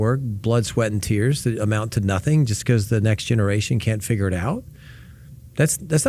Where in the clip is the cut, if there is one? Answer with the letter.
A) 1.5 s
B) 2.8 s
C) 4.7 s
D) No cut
D